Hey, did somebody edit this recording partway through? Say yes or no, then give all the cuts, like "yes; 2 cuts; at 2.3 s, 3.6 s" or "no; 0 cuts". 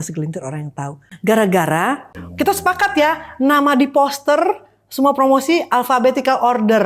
yes; 2 cuts; at 1.1 s, 2.2 s